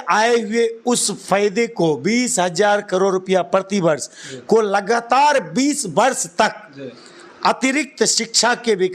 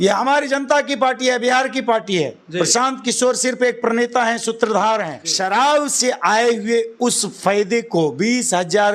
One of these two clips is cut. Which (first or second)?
second